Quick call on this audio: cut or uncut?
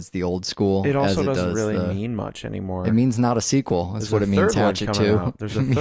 cut